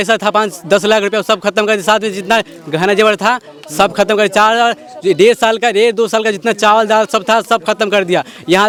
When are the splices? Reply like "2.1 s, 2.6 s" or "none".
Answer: none